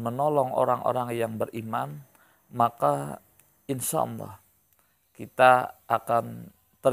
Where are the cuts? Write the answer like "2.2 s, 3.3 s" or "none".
none